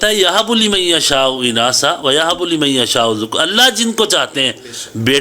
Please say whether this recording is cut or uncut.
uncut